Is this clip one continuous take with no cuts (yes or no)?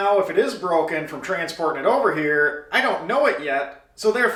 yes